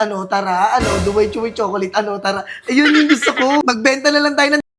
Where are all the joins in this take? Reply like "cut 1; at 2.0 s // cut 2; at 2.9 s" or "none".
cut 1; at 3.6 s